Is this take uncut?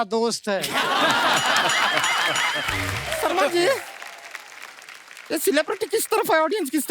no; 1 cut; at 3.0 s

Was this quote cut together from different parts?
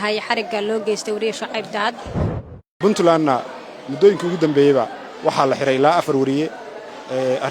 yes; 1 cut; at 2.6 s

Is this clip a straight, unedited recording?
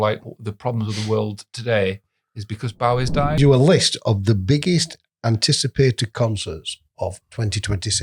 no; 1 cut; at 3.4 s

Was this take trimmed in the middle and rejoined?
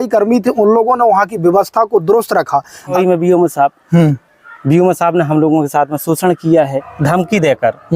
yes; 2 cuts; at 2.9 s, 6.8 s

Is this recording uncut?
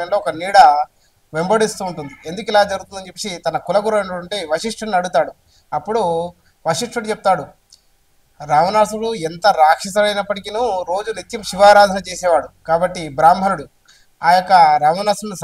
yes; 0 cuts

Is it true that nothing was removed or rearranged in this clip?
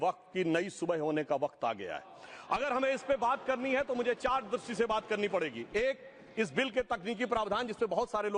yes; 0 cuts

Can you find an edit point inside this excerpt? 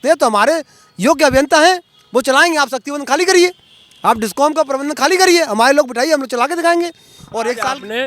no; 0 cuts

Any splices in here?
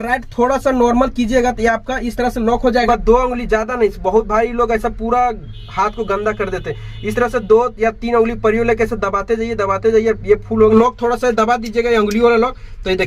yes; 2 cuts; at 2.9 s, 10.8 s

